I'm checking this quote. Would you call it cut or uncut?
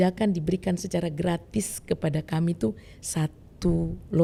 uncut